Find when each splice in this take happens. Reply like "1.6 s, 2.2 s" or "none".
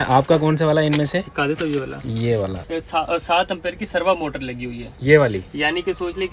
2.7 s